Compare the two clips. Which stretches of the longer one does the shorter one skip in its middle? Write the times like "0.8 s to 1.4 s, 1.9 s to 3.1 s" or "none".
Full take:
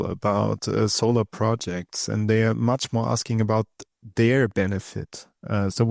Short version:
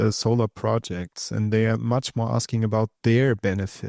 3.7 s to 4.1 s